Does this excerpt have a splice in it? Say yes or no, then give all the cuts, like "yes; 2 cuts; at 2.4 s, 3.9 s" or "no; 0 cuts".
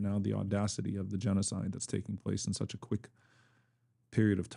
no; 0 cuts